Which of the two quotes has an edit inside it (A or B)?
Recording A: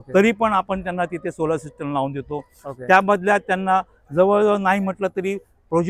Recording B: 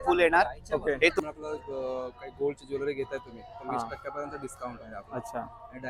B